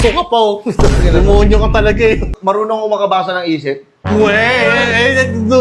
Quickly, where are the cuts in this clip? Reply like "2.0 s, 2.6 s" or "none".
2.4 s